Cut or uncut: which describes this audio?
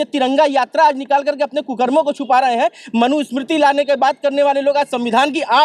uncut